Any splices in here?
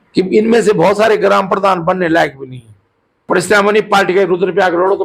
yes; 1 cut; at 3.2 s

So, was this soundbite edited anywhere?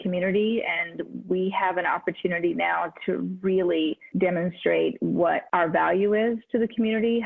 no; 0 cuts

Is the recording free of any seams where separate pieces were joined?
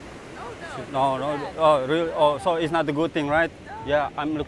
yes; 0 cuts

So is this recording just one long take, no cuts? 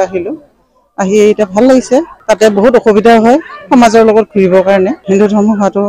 no; 2 cuts; at 2.2 s, 5.0 s

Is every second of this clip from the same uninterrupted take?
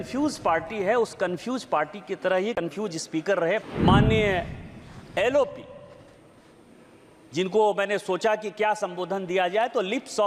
no; 1 cut; at 3.6 s

